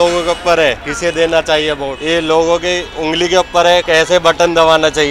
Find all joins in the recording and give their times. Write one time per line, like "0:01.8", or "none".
0:00.9
0:02.0
0:03.8